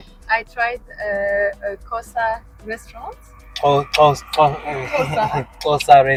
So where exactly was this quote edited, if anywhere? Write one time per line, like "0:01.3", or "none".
none

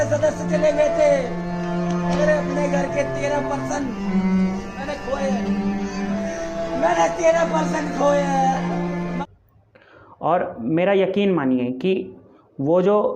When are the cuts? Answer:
0:09.2

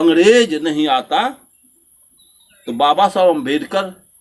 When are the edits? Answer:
none

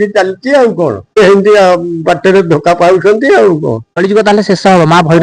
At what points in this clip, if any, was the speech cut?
0:01.1
0:03.9

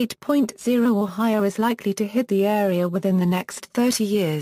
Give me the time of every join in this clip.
0:01.2

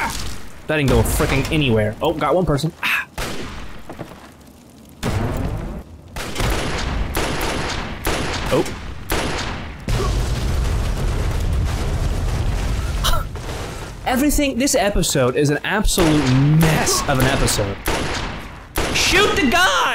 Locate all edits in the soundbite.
0:05.8

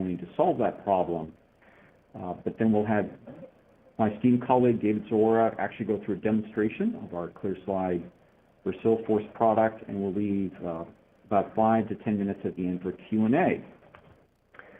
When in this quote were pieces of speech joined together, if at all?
0:04.3

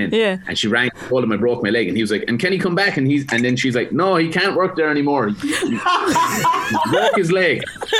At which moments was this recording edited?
none

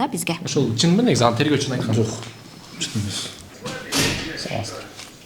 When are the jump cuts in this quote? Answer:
0:03.5

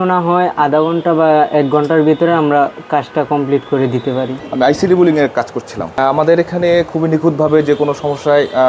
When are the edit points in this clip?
0:04.4
0:06.0

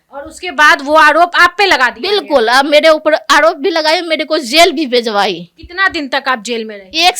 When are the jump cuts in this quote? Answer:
none

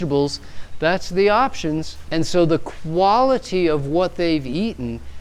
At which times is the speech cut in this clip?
0:02.0

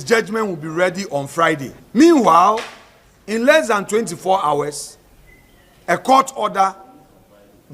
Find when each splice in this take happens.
0:01.8

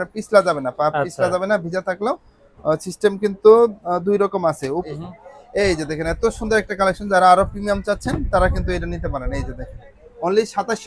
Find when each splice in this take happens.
0:04.8

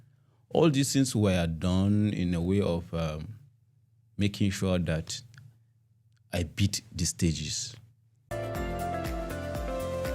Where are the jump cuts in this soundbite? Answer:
none

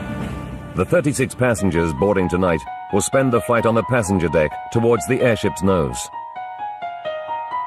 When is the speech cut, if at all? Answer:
0:04.8

